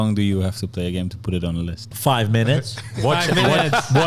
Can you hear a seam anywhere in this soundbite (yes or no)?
yes